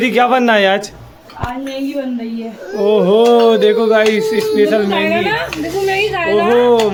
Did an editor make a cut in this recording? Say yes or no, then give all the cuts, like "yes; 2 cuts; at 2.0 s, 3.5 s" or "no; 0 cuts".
no; 0 cuts